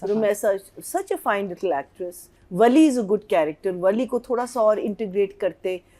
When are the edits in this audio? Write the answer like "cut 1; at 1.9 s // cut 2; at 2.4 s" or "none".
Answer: cut 1; at 2.4 s